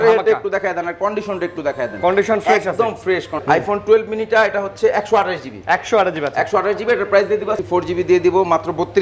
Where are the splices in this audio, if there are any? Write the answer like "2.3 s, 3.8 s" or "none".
3.3 s, 7.6 s